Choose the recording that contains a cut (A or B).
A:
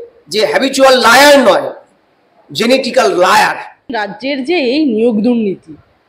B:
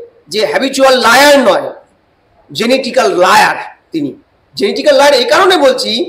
A